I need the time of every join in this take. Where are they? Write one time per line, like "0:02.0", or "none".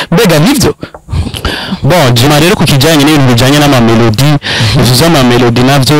0:02.3